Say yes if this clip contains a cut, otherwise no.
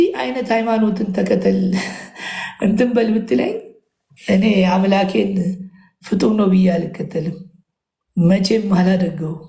no